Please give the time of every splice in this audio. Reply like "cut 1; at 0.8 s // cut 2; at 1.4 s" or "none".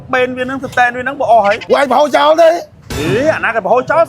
cut 1; at 1.6 s